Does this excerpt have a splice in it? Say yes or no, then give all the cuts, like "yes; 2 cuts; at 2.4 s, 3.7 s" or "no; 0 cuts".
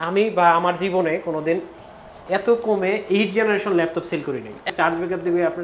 yes; 1 cut; at 4.7 s